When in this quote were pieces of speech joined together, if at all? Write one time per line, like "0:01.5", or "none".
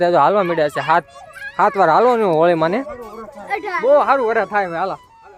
none

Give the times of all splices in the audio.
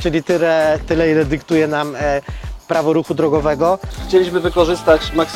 0:03.9

